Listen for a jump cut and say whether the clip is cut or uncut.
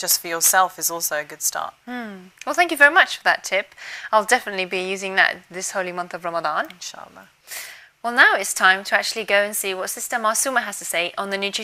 cut